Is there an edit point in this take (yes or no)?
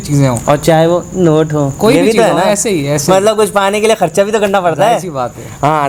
no